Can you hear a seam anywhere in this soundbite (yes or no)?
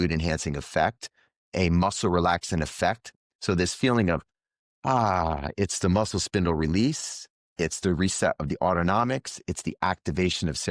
yes